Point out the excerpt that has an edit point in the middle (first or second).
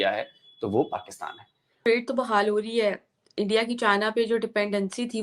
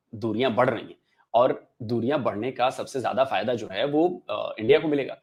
first